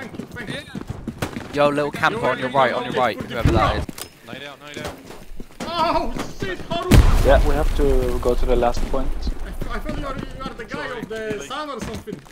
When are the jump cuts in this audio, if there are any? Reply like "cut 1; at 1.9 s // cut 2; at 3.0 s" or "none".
cut 1; at 3.9 s